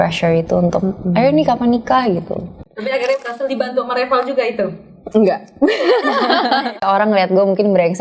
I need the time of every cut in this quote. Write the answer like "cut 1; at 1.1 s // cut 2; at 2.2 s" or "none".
cut 1; at 2.6 s // cut 2; at 6.8 s

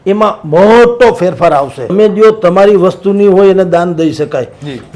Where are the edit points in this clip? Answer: cut 1; at 1.9 s

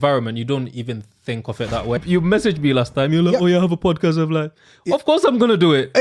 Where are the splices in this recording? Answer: cut 1; at 2.0 s

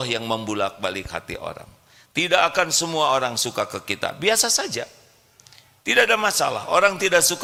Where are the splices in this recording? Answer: none

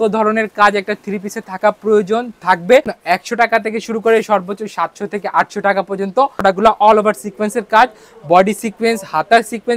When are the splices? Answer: cut 1; at 3.0 s // cut 2; at 6.4 s

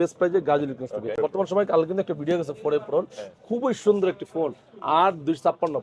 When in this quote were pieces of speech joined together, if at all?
cut 1; at 1.2 s

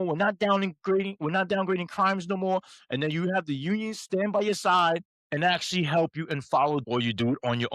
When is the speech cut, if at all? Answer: cut 1; at 5.1 s // cut 2; at 6.8 s

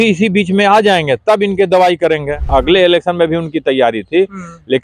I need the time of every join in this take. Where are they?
cut 1; at 2.5 s

